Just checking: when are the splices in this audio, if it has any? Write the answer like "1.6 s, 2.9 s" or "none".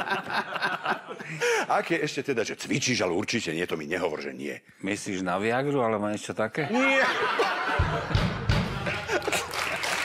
none